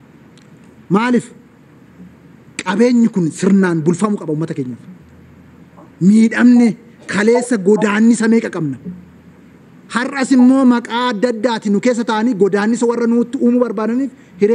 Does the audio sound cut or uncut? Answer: uncut